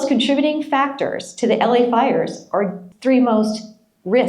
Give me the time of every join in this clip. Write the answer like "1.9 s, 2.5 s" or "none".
2.9 s